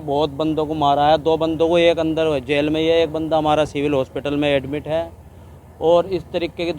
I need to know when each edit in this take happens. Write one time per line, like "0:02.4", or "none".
none